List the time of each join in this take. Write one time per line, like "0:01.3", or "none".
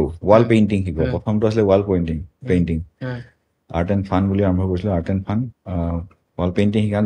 none